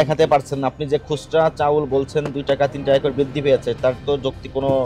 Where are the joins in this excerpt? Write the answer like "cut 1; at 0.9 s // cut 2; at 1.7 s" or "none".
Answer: none